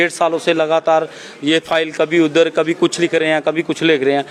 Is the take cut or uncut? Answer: uncut